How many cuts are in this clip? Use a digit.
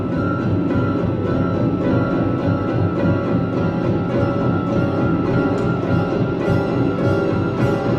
0